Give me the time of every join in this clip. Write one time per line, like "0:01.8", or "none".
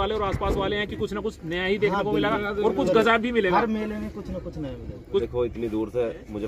0:05.2